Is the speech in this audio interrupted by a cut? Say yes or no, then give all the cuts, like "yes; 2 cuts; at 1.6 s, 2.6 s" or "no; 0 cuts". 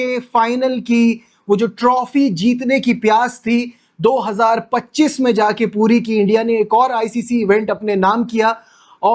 no; 0 cuts